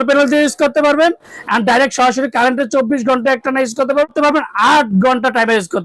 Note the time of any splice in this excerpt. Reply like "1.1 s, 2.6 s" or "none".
4.1 s

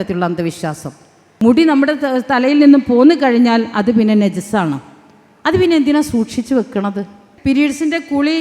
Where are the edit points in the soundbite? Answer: 1.2 s, 7.2 s

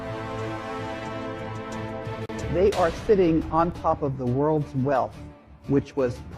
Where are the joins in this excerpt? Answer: 2.5 s

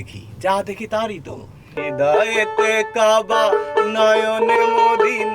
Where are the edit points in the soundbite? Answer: 1.8 s

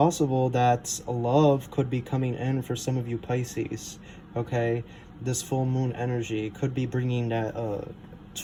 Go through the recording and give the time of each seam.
none

